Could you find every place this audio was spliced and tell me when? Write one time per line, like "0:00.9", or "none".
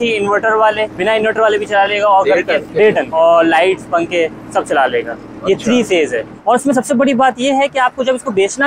0:01.0
0:02.9
0:06.3